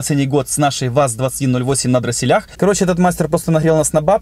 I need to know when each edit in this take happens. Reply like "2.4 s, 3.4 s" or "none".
2.5 s

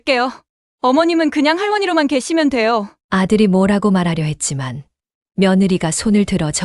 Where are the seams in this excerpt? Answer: none

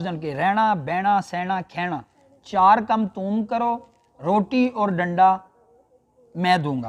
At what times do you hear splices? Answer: none

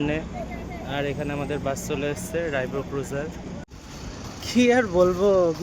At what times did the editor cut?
3.8 s

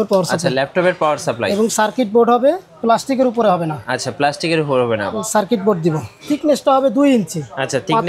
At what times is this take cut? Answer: 6.2 s

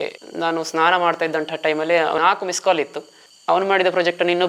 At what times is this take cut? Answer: 2.2 s, 3.2 s

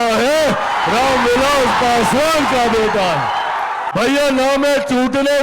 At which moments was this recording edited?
3.9 s

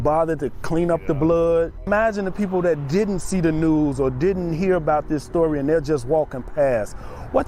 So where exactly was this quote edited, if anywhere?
1.9 s

